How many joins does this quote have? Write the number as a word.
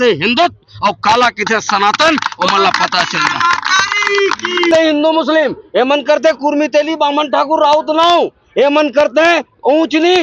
one